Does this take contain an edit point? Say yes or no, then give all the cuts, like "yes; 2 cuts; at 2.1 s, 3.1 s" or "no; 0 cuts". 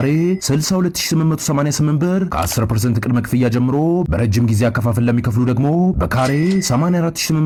no; 0 cuts